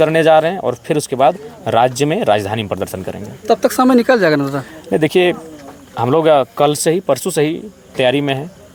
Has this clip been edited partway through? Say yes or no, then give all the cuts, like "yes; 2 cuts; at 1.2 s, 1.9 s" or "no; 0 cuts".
no; 0 cuts